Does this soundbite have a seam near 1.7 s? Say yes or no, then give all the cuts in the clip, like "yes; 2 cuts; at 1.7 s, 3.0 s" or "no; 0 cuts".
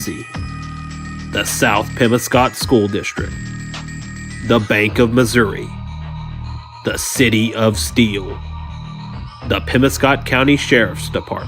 no; 1 cut; at 10.5 s